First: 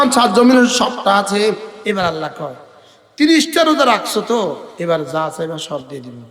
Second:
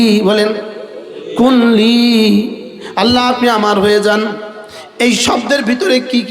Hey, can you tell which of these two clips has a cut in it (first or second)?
first